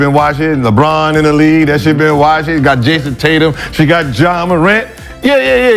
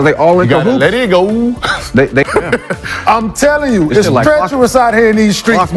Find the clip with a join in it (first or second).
second